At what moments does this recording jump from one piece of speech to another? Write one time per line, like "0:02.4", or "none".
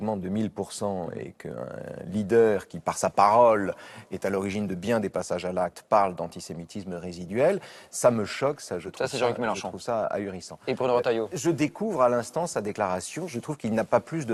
none